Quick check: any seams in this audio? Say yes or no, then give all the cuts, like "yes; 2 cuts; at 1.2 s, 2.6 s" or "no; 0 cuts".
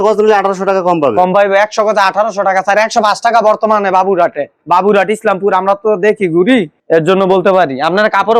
no; 0 cuts